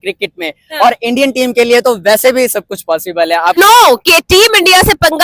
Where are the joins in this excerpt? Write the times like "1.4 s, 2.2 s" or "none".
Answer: 3.6 s